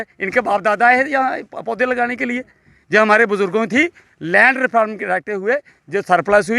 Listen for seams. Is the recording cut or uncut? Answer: uncut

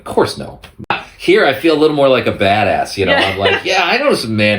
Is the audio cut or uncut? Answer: cut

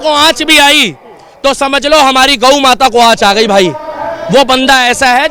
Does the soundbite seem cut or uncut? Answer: uncut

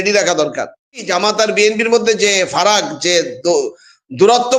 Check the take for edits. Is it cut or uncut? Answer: cut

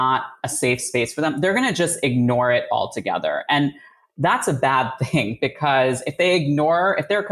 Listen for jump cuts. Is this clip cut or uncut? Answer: uncut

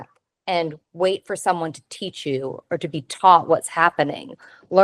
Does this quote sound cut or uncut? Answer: uncut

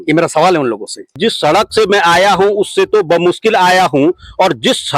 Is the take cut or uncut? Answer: cut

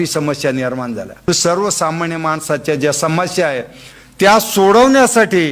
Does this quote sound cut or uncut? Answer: cut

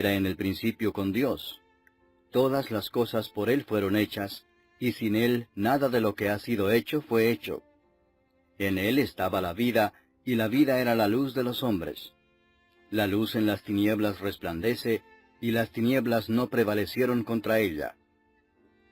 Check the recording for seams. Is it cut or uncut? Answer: cut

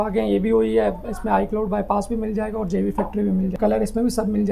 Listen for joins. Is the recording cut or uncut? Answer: cut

